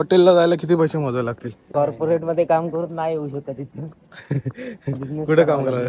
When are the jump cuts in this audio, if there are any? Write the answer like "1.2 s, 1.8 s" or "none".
1.6 s